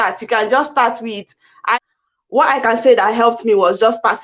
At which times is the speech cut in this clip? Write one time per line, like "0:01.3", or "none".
0:01.8